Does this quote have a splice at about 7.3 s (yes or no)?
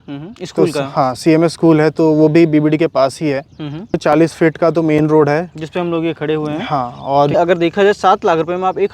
yes